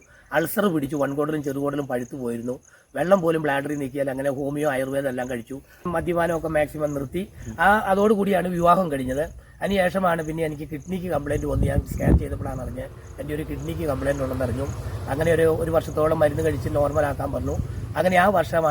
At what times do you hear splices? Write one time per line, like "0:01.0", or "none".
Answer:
0:05.9

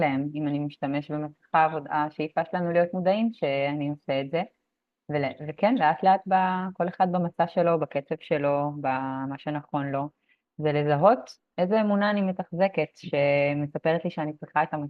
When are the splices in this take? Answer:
none

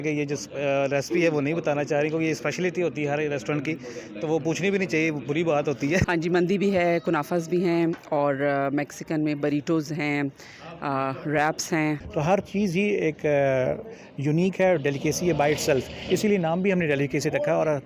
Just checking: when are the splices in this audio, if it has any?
0:06.1
0:12.0

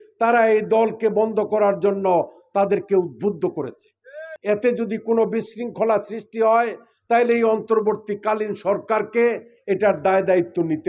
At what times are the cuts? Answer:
0:04.3

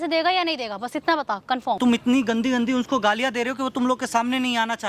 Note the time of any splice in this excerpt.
0:01.8

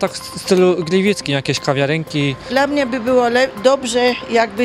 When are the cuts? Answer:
0:02.4

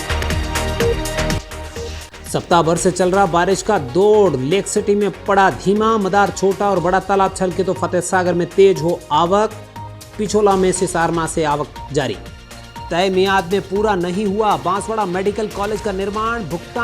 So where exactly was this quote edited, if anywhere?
0:01.3

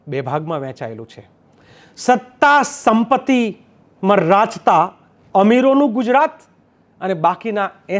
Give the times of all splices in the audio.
none

